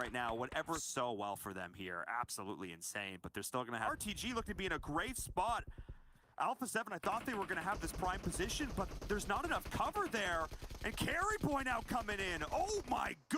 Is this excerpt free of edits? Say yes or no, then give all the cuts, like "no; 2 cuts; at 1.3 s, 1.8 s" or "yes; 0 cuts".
no; 2 cuts; at 0.8 s, 3.9 s